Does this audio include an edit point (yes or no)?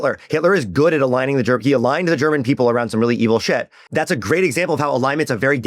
yes